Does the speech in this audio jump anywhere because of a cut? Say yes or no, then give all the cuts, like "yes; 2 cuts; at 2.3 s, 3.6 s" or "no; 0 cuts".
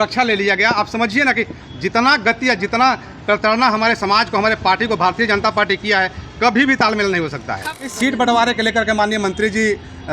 yes; 1 cut; at 7.7 s